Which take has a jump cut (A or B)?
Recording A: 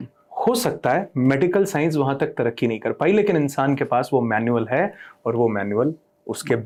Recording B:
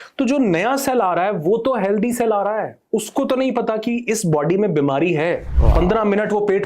B